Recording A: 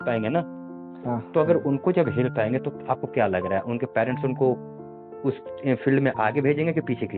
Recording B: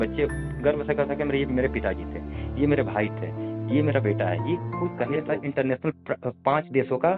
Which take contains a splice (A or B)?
B